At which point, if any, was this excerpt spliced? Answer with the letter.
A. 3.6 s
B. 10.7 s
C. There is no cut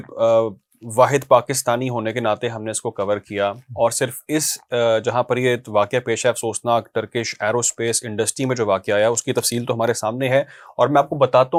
C